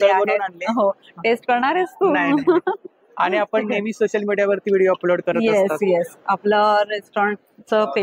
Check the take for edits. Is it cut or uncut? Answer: uncut